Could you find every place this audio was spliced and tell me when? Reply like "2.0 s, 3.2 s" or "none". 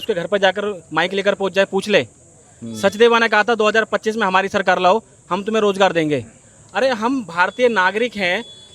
none

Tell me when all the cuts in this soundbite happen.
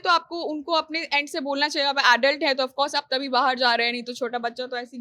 none

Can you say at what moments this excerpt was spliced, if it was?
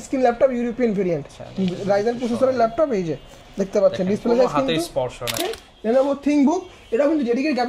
5.4 s

